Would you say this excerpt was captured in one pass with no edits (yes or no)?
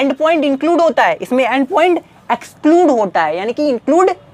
yes